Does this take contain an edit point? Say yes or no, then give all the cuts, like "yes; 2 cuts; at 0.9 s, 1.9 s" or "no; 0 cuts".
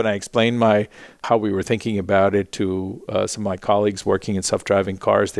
yes; 1 cut; at 1.2 s